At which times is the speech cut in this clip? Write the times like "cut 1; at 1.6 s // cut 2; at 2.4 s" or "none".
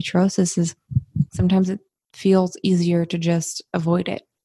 none